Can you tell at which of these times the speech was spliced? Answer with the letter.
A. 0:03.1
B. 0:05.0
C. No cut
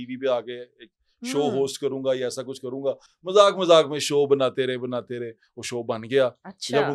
C